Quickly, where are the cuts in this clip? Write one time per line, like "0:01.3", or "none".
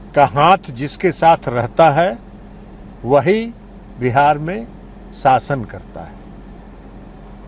none